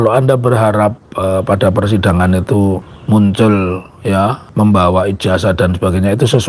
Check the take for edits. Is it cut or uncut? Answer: cut